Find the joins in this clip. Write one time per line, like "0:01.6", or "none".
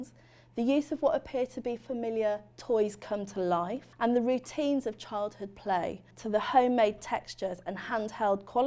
0:03.8
0:06.1